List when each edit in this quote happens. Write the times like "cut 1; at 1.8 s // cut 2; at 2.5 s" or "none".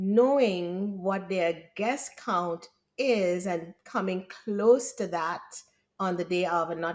none